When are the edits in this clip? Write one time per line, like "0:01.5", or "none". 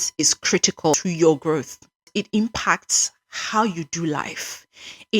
0:00.9
0:02.1